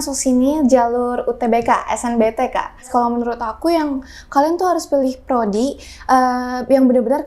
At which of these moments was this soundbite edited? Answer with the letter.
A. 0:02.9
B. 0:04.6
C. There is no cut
A